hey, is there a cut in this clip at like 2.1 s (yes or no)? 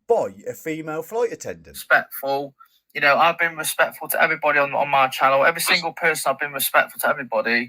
yes